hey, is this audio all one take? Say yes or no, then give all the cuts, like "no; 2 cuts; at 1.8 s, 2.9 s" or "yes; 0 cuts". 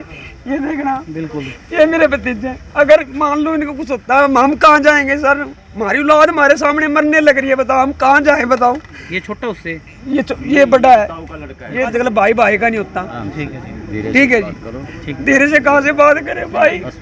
no; 1 cut; at 11.9 s